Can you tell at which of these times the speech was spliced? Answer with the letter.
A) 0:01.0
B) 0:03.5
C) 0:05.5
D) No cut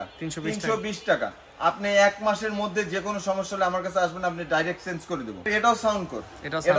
C